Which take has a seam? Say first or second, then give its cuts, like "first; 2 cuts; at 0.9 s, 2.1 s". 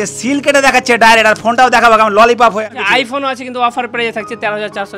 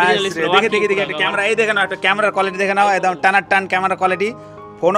first; 1 cut; at 2.6 s